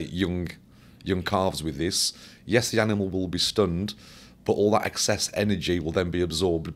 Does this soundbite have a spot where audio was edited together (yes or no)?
no